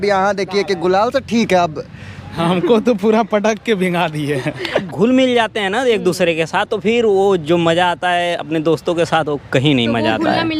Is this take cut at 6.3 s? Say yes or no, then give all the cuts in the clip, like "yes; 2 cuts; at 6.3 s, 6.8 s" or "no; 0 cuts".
no; 2 cuts; at 2.3 s, 4.9 s